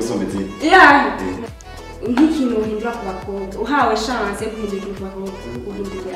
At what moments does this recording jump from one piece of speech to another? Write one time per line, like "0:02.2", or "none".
0:01.4